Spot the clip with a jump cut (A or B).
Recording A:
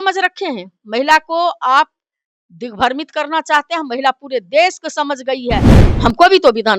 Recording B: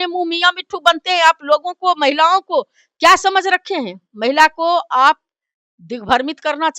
A